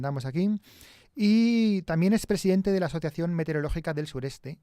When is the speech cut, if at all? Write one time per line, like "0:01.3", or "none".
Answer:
0:02.6